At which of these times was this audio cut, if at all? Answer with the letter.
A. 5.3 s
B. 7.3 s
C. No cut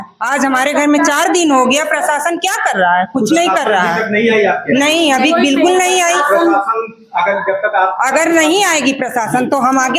C